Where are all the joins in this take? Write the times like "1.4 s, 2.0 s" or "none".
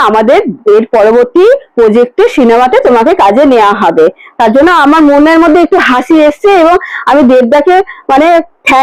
none